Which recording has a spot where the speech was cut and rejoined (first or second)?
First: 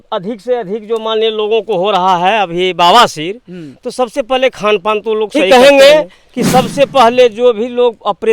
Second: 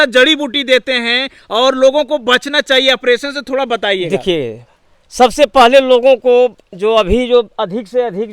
first